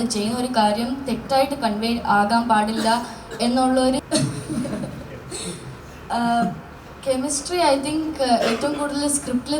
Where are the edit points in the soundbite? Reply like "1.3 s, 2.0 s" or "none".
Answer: 4.0 s